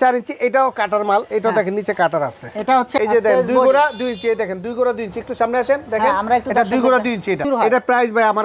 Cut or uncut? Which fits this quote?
cut